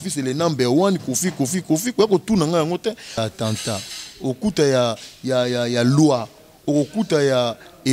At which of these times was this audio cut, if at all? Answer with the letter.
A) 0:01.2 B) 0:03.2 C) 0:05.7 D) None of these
B